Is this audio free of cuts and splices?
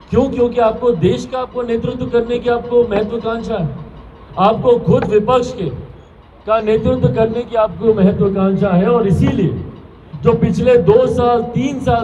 yes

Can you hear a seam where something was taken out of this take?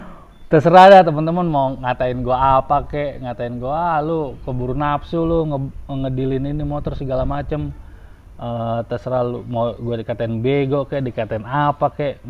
no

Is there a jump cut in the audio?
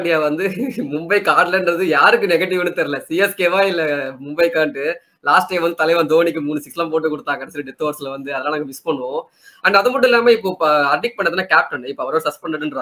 no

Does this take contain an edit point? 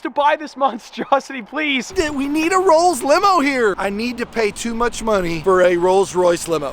yes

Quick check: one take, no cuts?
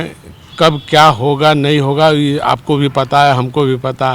yes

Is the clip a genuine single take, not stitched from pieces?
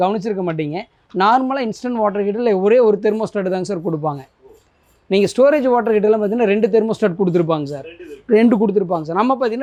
yes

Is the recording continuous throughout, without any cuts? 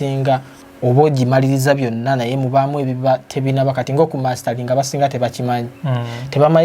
yes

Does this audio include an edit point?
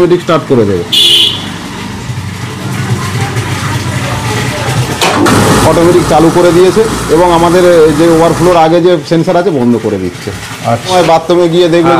yes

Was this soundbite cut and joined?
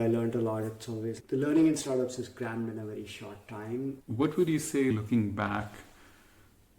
yes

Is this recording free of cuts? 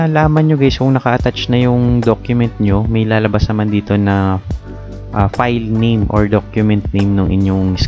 yes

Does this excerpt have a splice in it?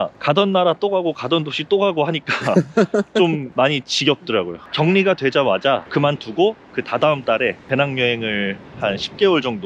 yes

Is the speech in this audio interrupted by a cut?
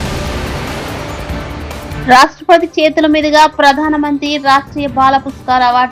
no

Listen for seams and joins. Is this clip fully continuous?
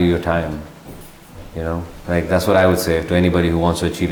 yes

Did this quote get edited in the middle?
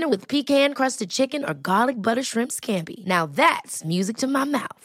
no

